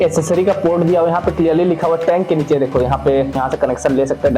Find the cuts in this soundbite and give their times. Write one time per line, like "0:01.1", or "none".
0:03.4